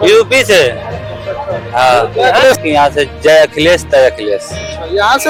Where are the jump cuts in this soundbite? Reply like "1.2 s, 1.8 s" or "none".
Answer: none